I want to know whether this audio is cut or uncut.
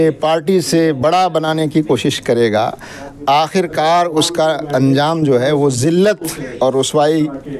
uncut